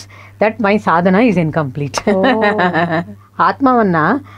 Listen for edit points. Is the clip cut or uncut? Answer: cut